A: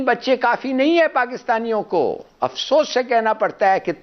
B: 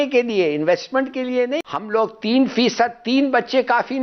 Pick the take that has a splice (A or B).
B